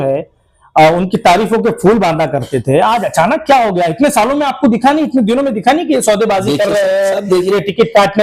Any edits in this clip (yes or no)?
no